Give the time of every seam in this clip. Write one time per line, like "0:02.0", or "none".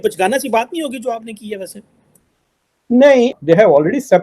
0:03.3